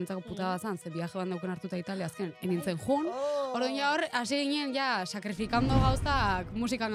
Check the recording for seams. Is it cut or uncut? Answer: uncut